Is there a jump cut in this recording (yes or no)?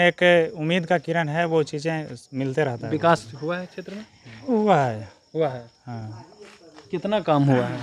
no